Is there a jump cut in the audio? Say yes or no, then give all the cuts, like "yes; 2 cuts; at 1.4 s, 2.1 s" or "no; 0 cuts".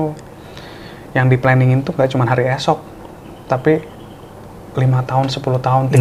no; 0 cuts